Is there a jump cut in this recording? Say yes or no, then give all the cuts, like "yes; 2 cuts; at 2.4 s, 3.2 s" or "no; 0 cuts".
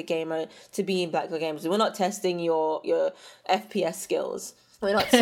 yes; 1 cut; at 3.4 s